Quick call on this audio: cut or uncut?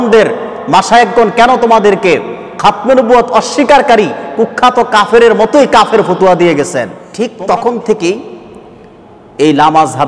cut